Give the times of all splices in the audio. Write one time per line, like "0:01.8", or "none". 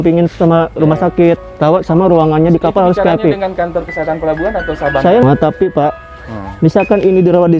0:05.2